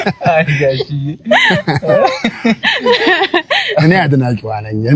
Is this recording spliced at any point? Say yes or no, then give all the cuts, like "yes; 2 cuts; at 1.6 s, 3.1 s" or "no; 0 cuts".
no; 0 cuts